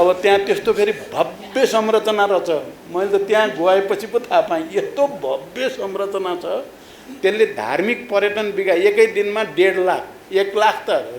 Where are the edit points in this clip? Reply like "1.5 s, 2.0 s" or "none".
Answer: none